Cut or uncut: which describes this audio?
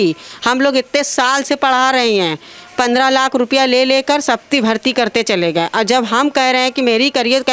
uncut